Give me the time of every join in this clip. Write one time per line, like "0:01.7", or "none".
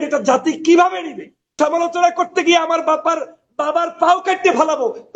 0:01.5